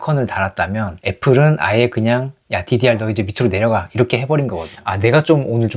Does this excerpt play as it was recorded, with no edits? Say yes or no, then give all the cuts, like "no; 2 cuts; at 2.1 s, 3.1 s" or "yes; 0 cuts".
no; 1 cut; at 4.7 s